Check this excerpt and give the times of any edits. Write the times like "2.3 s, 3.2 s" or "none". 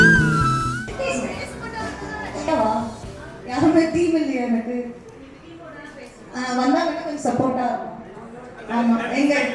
2.5 s